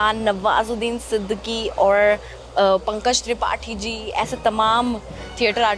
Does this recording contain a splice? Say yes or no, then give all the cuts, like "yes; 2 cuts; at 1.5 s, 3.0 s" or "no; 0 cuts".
no; 0 cuts